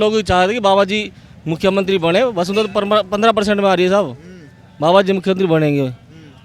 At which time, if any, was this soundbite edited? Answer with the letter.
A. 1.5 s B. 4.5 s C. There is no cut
C